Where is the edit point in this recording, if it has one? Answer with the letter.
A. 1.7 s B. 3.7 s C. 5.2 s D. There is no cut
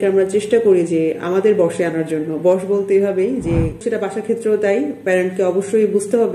B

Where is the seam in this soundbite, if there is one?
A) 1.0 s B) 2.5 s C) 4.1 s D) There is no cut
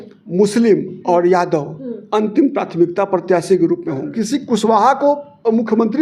C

